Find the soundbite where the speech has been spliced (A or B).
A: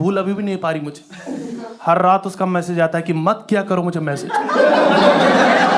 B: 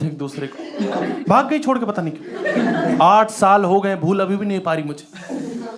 B